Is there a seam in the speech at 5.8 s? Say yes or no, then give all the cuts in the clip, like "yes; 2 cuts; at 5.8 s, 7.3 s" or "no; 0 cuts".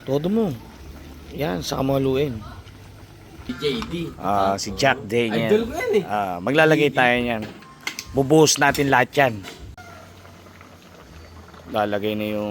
no; 2 cuts; at 3.5 s, 9.7 s